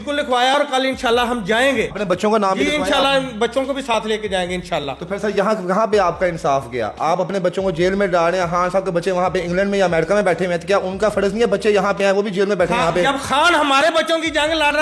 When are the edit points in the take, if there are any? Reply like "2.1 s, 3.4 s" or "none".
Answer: 1.9 s